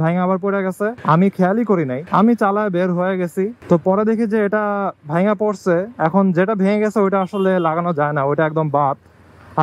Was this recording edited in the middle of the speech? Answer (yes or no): yes